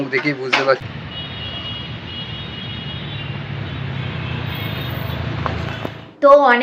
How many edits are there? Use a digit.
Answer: 0